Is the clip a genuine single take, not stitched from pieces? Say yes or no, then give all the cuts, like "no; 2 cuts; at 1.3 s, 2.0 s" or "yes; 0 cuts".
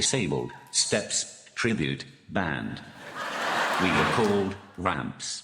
yes; 0 cuts